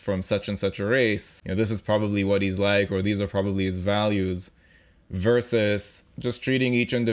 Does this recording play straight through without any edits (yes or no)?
no